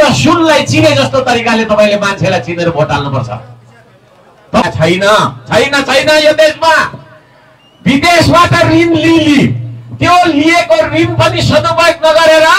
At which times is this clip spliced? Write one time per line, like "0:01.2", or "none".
0:04.6

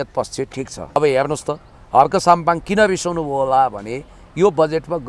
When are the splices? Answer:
0:01.0

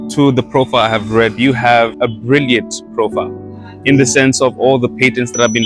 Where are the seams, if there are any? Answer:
0:01.9

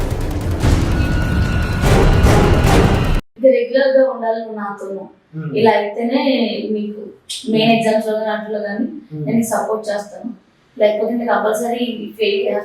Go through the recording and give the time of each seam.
0:03.2

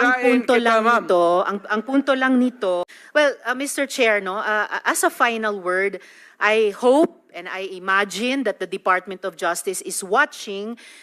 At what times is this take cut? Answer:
0:03.0

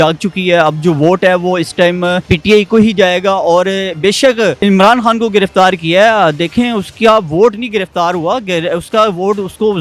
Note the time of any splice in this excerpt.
0:02.2
0:04.6

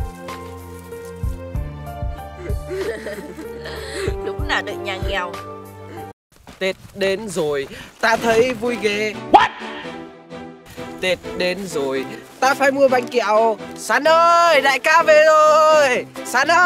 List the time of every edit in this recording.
0:06.1

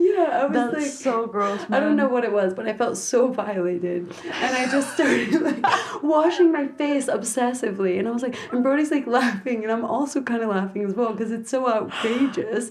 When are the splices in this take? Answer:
none

